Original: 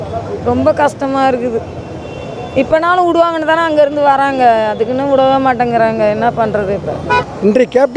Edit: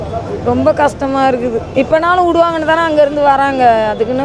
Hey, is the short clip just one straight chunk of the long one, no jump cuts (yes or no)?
no